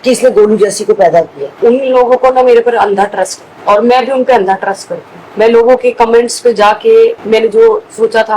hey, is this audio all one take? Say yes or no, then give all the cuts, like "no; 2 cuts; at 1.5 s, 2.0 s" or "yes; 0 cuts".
no; 1 cut; at 1.4 s